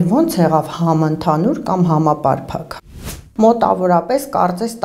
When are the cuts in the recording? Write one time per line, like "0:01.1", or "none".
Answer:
0:02.8